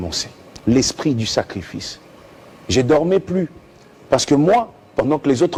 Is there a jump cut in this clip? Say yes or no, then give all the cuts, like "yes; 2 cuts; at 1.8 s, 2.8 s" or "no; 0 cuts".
no; 0 cuts